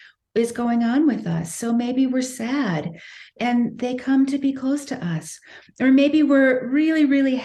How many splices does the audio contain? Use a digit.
1